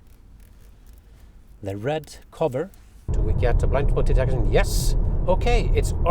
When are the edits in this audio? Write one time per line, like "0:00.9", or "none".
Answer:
0:03.0